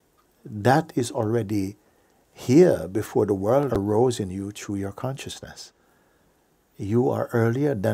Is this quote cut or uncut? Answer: cut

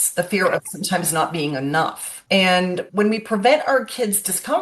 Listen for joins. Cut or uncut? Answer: cut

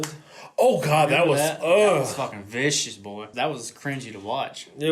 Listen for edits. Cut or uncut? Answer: cut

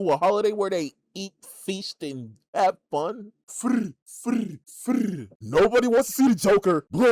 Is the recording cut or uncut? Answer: cut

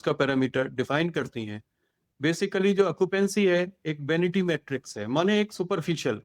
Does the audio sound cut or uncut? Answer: uncut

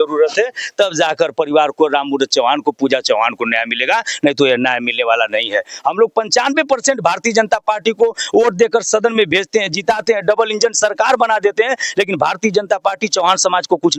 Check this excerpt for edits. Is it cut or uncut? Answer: uncut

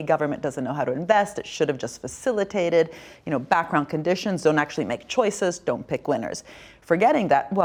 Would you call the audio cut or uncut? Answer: uncut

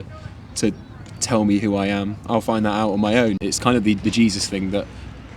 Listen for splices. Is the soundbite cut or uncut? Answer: cut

